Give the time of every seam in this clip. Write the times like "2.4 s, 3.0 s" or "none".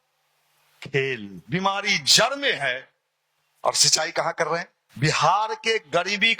1.3 s, 4.8 s